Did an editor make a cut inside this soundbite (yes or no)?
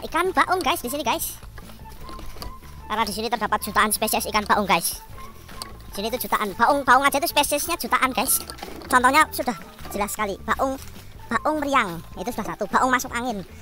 no